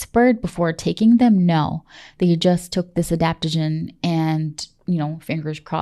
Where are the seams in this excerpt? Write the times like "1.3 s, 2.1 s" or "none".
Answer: none